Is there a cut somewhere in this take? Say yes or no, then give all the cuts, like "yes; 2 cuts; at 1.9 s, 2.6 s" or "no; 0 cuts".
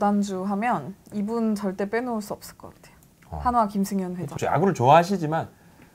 yes; 1 cut; at 4.3 s